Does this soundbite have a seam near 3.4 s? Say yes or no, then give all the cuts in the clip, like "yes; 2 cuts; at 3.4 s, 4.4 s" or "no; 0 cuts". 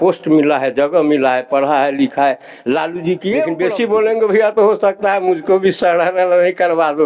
no; 0 cuts